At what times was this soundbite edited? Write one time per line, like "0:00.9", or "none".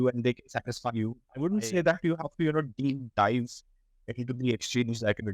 0:01.2